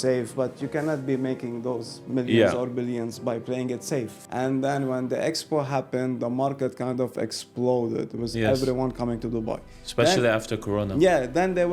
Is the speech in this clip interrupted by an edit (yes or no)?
yes